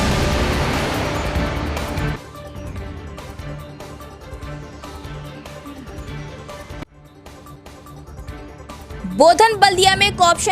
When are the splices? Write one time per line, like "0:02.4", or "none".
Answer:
0:02.0